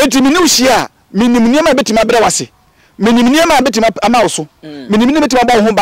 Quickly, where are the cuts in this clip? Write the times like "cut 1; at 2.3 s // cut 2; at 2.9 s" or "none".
none